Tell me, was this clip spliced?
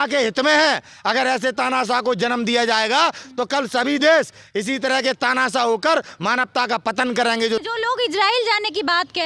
yes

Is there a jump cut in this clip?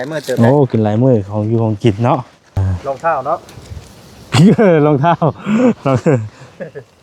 yes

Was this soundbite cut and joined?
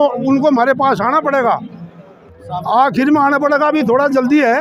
no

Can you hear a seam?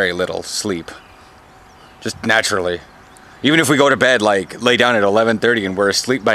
no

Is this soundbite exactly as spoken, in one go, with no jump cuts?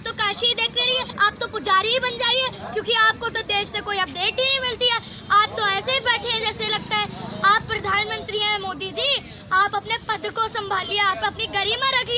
no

